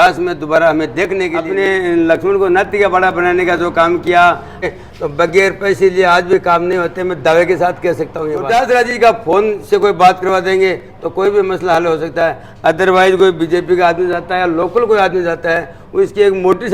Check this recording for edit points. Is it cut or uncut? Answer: cut